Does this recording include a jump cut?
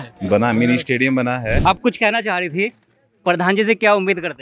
yes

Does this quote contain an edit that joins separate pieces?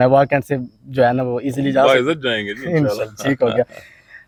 no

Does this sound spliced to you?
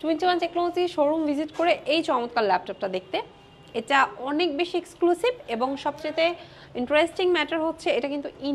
no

